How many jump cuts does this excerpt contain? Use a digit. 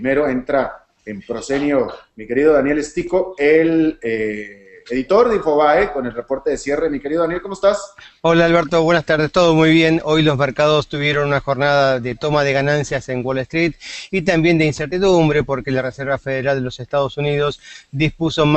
1